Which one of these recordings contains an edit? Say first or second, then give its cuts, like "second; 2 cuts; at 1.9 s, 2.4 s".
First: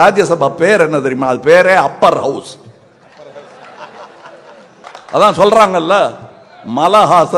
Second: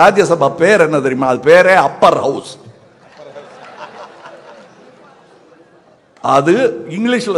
first; 1 cut; at 4.8 s